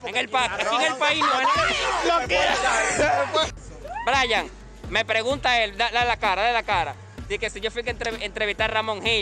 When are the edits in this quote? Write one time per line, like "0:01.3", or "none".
0:03.6